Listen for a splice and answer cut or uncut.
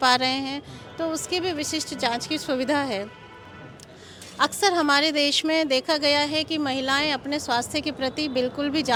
uncut